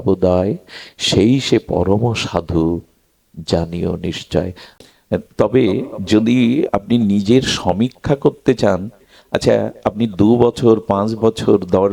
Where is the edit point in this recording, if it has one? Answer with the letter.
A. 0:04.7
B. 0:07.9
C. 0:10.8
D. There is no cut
A